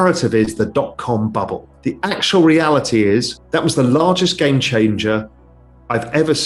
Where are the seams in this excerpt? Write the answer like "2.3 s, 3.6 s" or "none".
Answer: 1.7 s, 3.4 s